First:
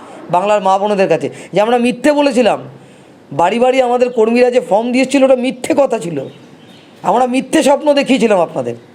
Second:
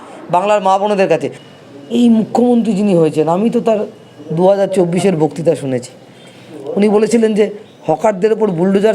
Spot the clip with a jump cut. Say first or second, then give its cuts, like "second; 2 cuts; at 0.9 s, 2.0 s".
second; 1 cut; at 1.4 s